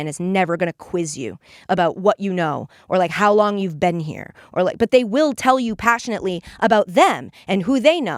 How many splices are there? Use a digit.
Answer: 0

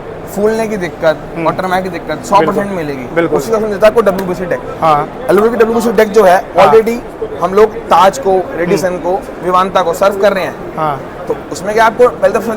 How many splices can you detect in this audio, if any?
0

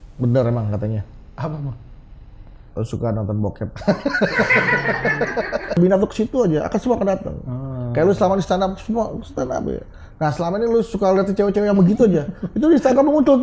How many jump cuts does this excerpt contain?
1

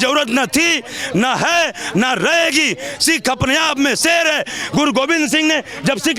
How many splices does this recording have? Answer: 0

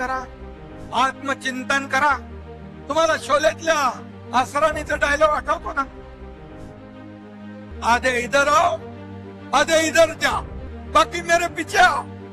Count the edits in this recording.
2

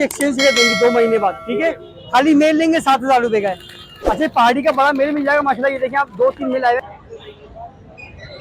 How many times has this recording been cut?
1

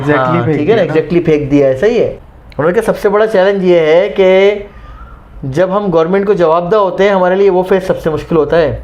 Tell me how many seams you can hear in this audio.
1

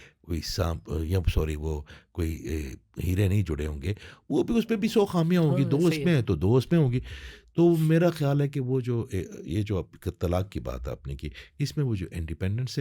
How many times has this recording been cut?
0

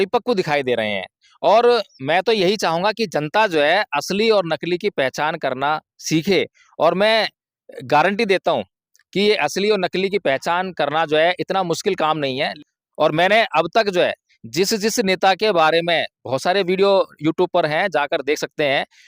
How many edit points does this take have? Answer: 1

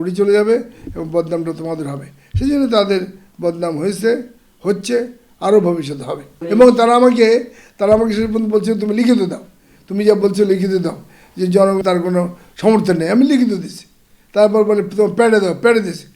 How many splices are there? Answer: 2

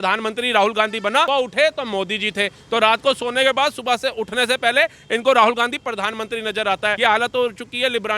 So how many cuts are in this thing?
2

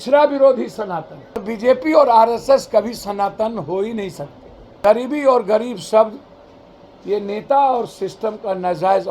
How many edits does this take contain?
2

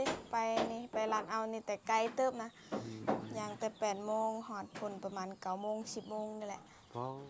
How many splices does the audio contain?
0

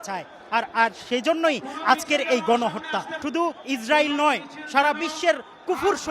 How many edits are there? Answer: 1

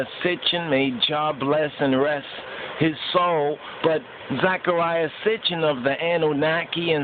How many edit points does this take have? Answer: 1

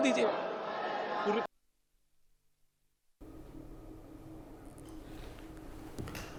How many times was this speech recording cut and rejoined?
0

